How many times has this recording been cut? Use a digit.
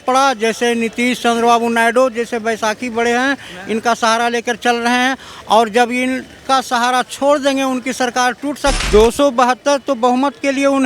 1